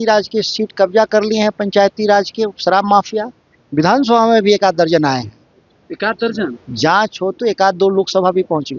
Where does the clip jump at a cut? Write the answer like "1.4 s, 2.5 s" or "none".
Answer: none